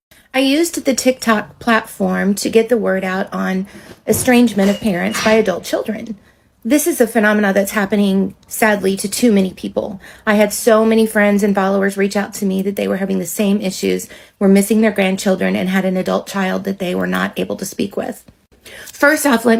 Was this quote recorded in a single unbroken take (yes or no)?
yes